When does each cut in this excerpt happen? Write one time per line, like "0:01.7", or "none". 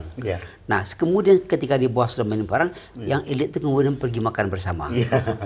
none